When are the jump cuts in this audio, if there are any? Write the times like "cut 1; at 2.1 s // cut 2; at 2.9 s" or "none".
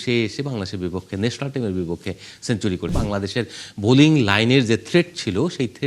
cut 1; at 2.9 s